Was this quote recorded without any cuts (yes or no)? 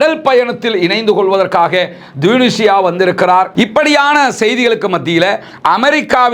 no